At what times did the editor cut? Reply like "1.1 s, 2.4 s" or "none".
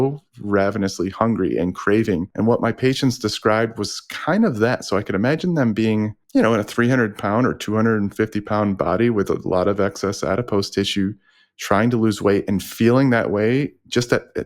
2.3 s, 6.2 s